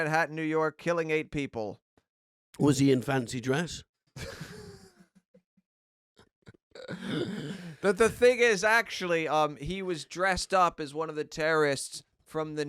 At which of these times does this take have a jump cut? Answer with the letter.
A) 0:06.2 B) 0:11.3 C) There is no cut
B